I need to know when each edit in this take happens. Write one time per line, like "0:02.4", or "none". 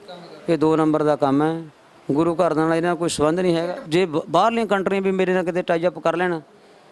0:03.8